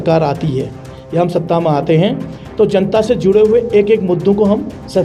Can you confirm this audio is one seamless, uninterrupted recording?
yes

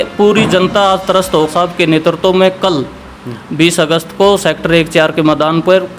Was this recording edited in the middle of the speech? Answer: yes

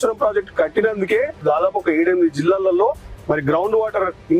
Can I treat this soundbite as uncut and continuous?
no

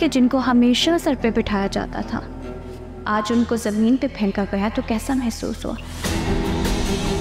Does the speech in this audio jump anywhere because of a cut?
no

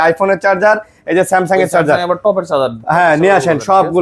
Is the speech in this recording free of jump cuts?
yes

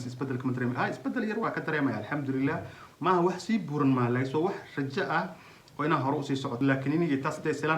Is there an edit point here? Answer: yes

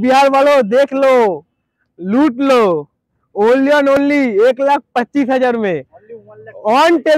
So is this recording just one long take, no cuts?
yes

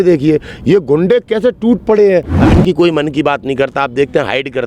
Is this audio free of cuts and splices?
no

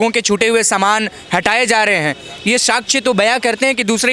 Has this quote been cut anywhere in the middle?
no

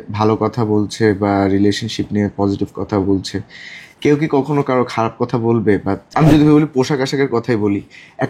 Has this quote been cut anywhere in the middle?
yes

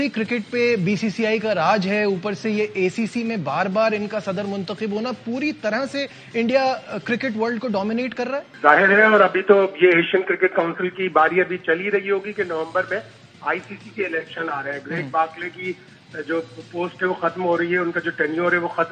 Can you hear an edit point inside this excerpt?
no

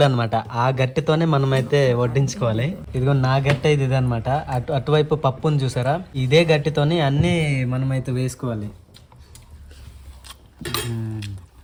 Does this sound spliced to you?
no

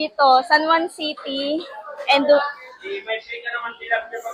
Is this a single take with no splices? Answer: yes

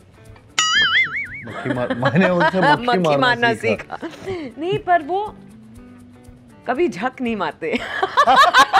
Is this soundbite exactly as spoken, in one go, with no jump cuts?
yes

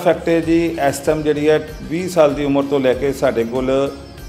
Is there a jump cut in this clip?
no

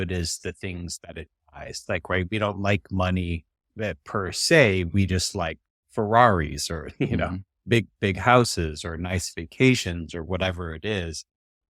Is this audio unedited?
yes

